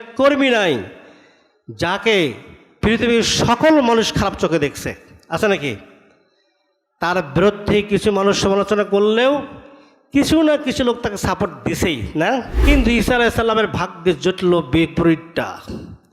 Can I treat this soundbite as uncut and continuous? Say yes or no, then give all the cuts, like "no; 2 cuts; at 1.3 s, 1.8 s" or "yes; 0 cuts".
no; 1 cut; at 12.5 s